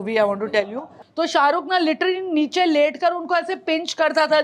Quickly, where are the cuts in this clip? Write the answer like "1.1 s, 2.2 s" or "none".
0.9 s